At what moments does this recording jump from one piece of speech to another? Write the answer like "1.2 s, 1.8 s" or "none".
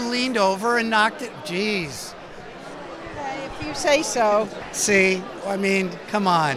4.7 s